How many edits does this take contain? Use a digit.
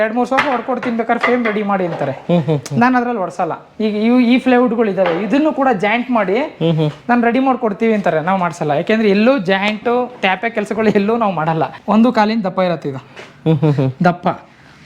1